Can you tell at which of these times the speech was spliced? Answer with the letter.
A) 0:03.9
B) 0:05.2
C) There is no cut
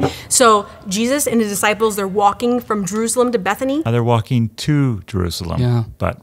C